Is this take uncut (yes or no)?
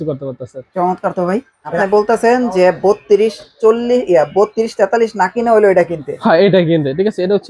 no